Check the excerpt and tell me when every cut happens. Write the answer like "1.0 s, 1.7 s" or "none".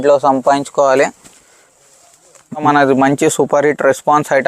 2.6 s